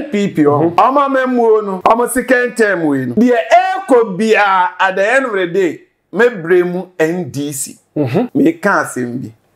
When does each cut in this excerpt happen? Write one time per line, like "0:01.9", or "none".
0:00.7
0:01.7
0:03.1
0:08.3